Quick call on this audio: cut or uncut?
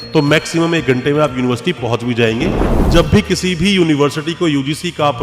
cut